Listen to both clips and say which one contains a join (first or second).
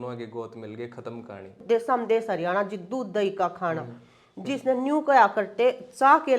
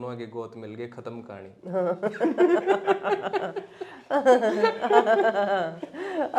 first